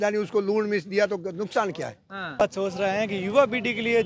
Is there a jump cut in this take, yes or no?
yes